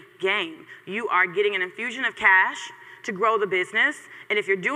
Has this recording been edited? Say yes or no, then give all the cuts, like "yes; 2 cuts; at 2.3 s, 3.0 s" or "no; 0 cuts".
no; 0 cuts